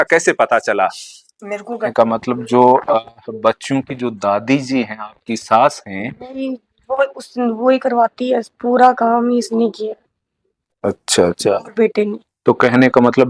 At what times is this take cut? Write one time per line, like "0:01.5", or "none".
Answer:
0:01.9